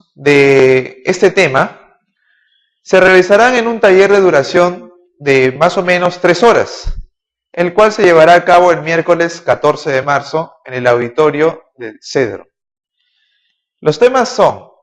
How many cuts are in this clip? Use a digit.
0